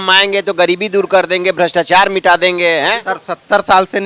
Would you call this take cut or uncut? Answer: uncut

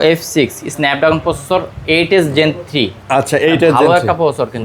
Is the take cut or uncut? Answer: uncut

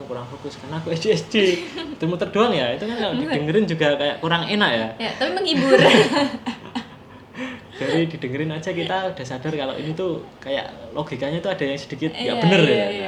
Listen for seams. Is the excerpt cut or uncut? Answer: uncut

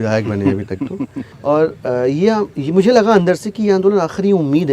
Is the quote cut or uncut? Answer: cut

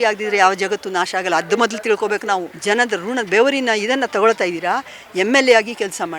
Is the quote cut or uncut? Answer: cut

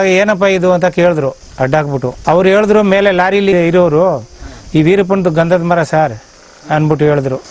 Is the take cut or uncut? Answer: uncut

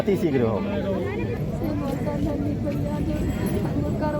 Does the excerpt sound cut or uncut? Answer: cut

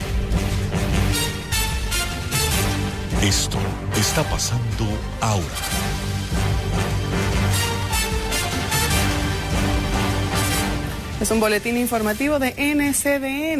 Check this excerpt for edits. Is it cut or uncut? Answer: uncut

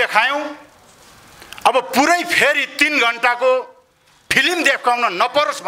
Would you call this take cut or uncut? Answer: uncut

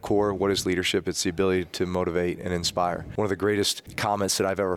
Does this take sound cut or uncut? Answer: cut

